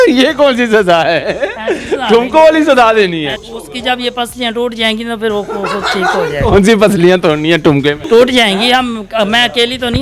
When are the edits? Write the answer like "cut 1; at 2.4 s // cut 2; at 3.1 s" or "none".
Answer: cut 1; at 3.4 s // cut 2; at 8.0 s